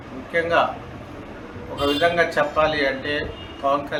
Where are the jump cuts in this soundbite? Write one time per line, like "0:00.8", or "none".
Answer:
none

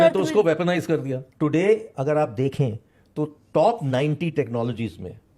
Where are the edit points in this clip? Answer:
0:01.2

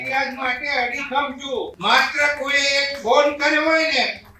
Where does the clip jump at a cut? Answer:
0:01.7

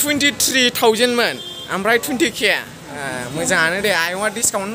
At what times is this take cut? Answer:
none

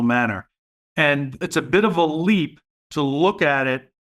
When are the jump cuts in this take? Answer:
0:01.4

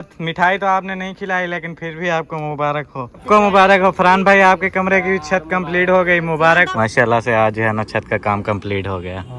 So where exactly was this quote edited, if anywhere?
0:03.2
0:06.7

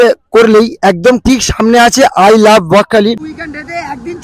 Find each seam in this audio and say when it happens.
0:03.2

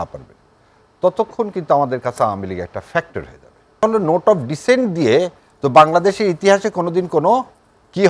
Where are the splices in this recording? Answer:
0:03.8

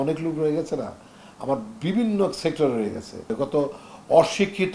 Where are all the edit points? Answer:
0:03.3

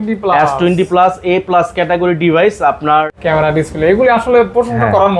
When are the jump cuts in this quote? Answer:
0:03.1

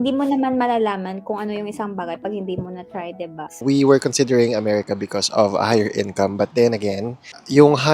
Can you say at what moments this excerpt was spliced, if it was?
0:03.6

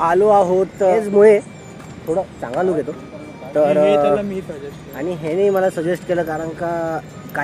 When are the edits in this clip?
0:00.9

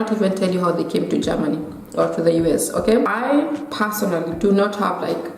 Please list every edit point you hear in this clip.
0:03.1

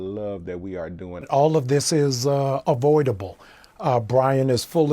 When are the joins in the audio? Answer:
0:01.3

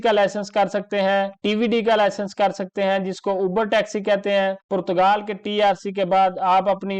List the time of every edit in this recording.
none

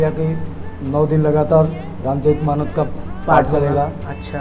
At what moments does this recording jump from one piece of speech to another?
none

